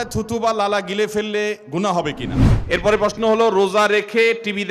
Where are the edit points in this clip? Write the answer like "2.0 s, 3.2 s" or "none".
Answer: 2.6 s